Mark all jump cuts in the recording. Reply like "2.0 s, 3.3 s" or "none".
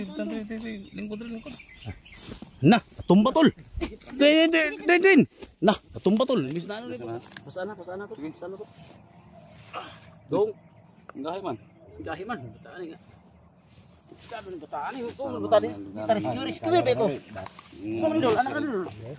6.6 s